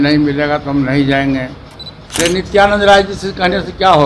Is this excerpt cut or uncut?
cut